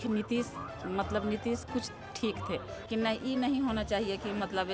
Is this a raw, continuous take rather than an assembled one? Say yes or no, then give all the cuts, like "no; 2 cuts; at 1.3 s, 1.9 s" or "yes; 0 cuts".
no; 1 cut; at 2.8 s